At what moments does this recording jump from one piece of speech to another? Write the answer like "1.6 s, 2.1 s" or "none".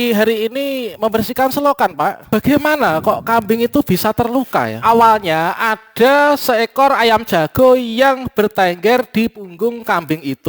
2.2 s